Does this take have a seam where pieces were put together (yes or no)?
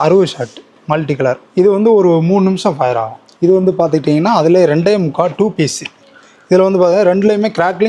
yes